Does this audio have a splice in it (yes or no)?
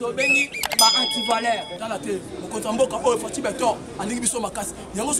yes